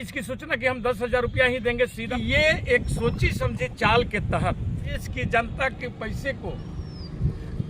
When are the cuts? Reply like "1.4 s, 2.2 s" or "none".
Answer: 2.0 s, 5.0 s